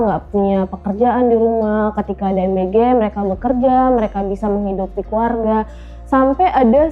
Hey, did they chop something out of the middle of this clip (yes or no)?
no